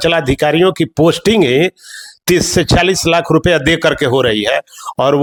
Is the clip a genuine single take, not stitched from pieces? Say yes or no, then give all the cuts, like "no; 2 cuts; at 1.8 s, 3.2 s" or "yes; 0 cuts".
yes; 0 cuts